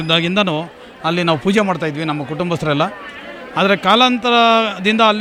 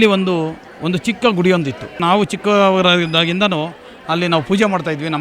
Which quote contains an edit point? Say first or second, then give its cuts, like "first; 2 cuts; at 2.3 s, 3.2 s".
second; 1 cut; at 2.0 s